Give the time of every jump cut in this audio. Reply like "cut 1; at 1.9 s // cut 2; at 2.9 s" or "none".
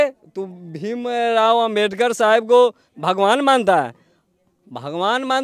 none